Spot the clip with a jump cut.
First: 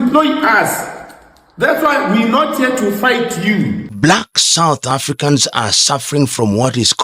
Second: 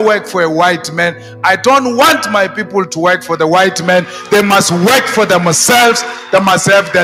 first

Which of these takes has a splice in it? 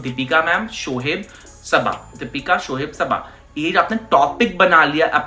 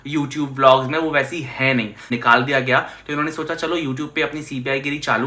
second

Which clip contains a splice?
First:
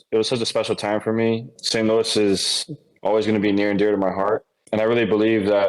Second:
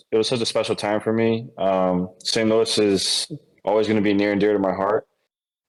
first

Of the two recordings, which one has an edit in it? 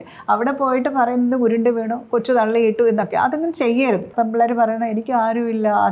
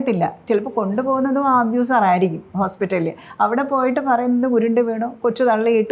first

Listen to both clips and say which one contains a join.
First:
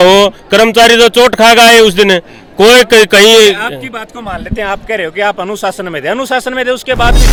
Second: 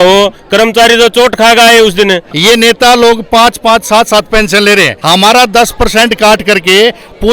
second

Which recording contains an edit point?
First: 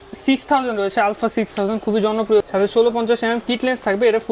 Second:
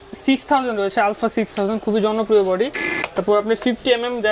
second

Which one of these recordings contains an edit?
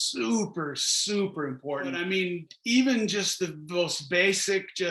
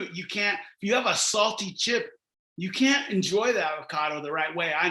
first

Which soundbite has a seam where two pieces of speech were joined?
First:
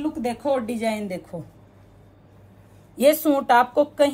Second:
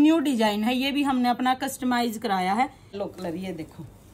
second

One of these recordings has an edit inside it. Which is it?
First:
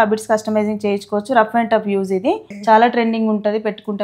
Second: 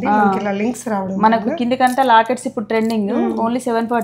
first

